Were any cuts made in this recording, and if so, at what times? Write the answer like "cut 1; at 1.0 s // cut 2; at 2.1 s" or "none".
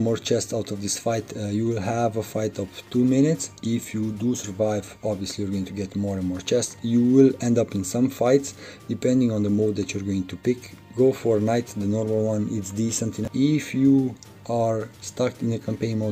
cut 1; at 6.8 s // cut 2; at 13.3 s